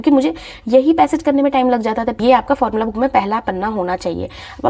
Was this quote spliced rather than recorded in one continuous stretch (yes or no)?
yes